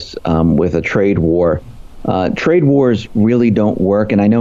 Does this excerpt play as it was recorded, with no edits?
yes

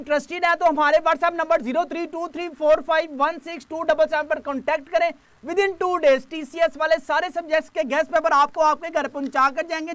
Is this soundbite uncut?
yes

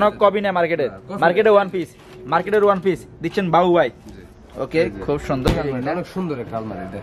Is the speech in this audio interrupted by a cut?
yes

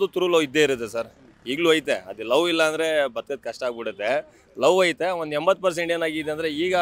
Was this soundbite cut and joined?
no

